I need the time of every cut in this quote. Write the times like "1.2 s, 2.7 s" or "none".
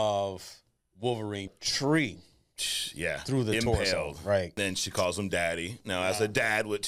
1.5 s, 4.5 s